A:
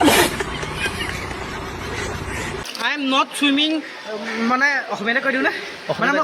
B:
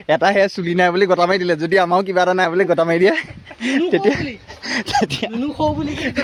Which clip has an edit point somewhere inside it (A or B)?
A